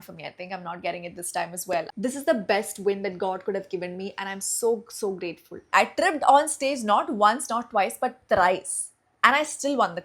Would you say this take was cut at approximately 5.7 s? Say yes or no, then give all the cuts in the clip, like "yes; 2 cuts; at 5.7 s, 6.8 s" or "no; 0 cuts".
yes; 2 cuts; at 1.9 s, 5.7 s